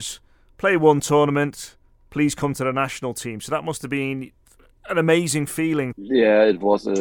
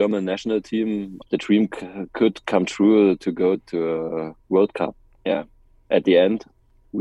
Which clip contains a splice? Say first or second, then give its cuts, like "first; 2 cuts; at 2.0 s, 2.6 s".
second; 1 cut; at 3.6 s